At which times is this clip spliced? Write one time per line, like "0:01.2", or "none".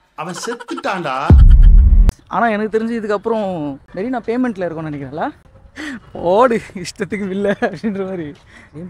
0:02.2